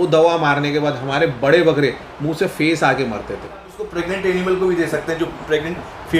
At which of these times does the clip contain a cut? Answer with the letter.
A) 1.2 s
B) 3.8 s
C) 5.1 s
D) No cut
B